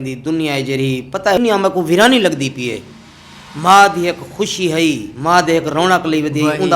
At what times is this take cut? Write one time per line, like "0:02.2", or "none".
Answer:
0:01.4